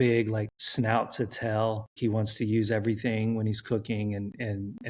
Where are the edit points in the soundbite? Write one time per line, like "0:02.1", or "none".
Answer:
0:01.9